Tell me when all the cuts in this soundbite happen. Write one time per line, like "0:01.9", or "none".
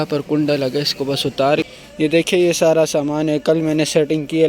0:01.7